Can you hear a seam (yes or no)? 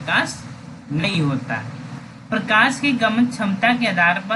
yes